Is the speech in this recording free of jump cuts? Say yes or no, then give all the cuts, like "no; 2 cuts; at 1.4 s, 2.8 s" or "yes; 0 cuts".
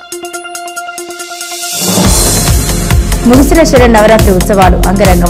yes; 0 cuts